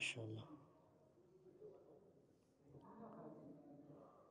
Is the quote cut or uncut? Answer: uncut